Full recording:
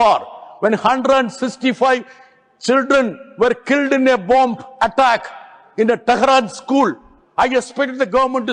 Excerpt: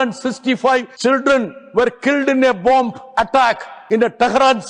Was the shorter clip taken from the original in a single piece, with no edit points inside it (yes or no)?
no